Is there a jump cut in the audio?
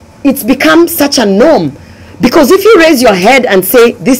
no; 0 cuts

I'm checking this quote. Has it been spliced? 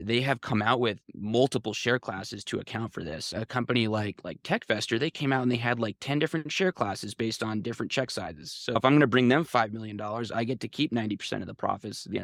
no; 0 cuts

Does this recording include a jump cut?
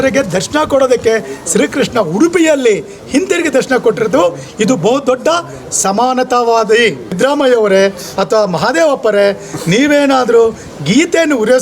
yes; 1 cut; at 7.2 s

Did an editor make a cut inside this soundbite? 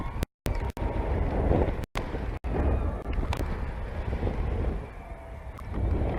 no; 0 cuts

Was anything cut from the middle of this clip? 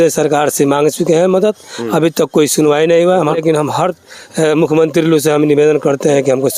yes; 1 cut; at 3.4 s

